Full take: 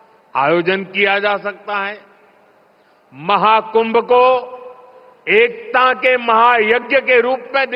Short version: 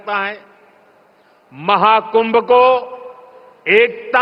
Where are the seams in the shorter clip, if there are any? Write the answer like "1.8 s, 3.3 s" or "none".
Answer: none